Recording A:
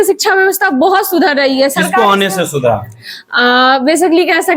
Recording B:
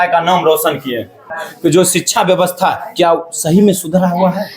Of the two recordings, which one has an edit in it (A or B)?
B